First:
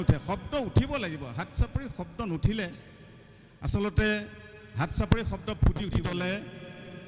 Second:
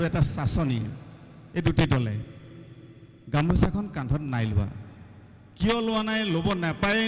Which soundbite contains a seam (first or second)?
first